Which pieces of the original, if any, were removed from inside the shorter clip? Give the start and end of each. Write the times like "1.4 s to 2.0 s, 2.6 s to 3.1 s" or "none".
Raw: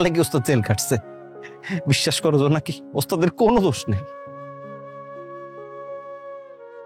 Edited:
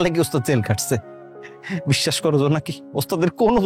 none